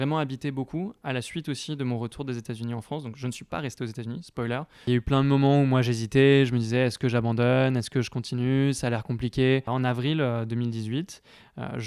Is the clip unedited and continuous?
no; 2 cuts; at 4.8 s, 9.7 s

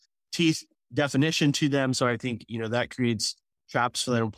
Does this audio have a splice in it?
no; 0 cuts

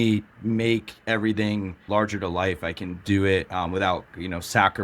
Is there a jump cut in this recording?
yes; 1 cut; at 1.9 s

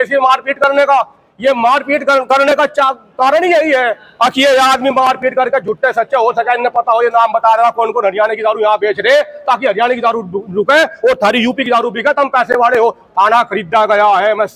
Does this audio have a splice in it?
no; 0 cuts

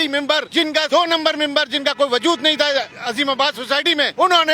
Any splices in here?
no; 0 cuts

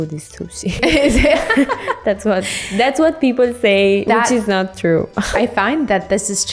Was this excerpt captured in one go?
no; 3 cuts; at 0.8 s, 4.0 s, 5.3 s

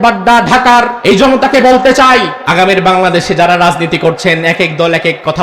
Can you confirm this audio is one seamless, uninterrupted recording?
no; 2 cuts; at 0.9 s, 2.4 s

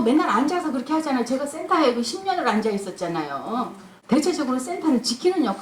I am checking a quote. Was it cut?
yes; 1 cut; at 3.9 s

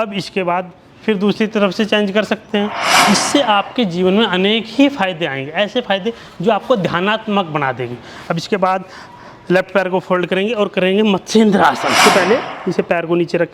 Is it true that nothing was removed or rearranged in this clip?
no; 2 cuts; at 2.9 s, 12.0 s

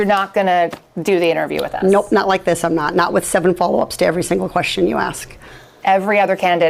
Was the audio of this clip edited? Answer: no; 0 cuts

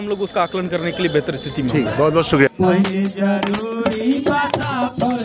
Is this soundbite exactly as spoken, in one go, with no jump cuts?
no; 1 cut; at 2.5 s

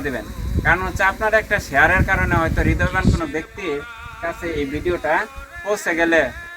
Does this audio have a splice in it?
no; 0 cuts

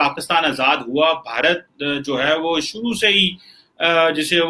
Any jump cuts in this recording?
no; 0 cuts

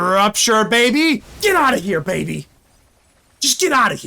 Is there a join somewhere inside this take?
yes; 1 cut; at 1.3 s

